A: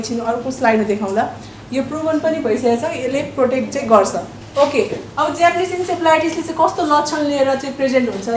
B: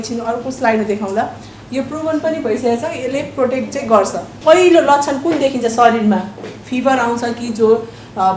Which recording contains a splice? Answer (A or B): B